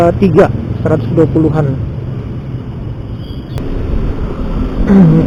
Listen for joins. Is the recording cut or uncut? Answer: uncut